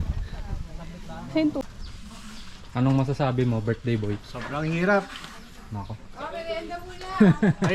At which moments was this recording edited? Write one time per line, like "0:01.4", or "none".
0:01.7